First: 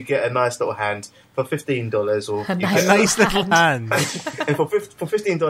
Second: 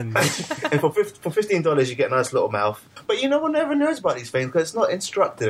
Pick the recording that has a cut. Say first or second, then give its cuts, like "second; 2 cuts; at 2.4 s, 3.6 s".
second; 1 cut; at 3.0 s